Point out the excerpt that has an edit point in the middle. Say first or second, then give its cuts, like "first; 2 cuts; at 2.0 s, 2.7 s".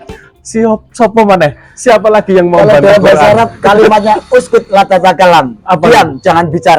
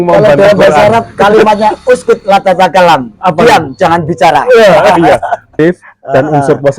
second; 1 cut; at 5.5 s